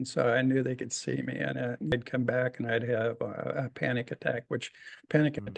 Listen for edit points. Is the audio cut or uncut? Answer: uncut